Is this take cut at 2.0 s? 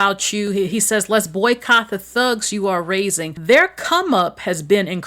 no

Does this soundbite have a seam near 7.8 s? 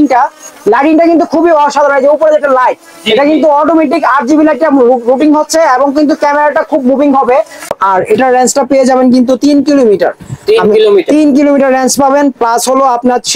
yes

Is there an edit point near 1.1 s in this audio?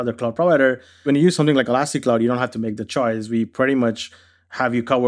yes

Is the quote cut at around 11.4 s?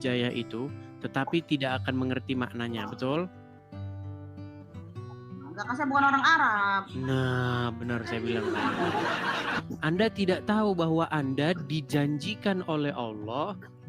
no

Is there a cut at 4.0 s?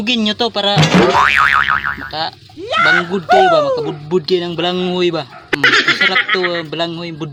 no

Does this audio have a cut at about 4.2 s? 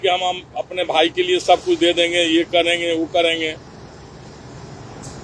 no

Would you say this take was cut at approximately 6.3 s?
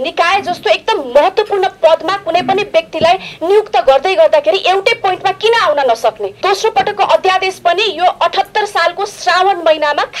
yes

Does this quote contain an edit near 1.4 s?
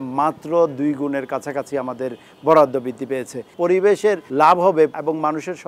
no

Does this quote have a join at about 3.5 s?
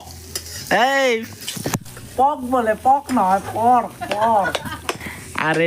no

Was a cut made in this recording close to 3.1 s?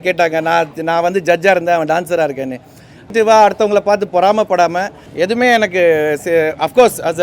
yes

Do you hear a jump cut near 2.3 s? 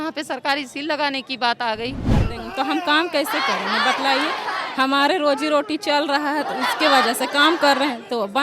yes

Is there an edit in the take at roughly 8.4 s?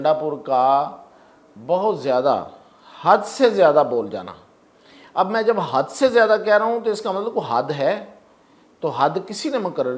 no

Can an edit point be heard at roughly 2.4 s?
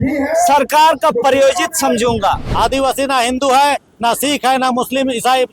yes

